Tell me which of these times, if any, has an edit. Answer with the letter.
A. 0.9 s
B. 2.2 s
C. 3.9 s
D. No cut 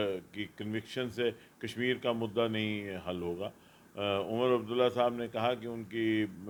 D